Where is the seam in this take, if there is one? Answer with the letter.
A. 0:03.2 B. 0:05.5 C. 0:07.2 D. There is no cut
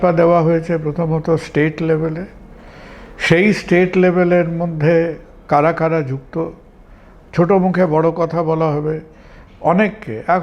D